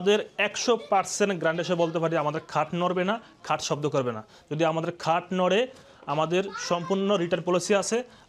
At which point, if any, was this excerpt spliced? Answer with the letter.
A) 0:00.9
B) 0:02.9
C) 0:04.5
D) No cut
D